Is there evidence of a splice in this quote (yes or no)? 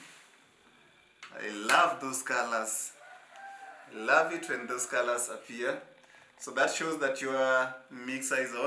no